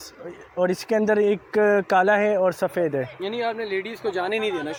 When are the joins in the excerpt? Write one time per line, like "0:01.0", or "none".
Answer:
none